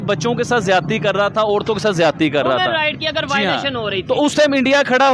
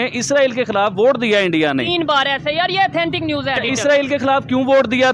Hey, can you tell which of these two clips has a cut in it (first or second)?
second